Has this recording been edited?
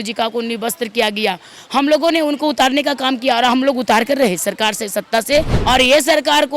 yes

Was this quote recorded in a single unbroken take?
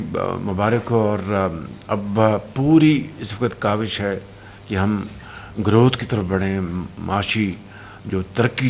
yes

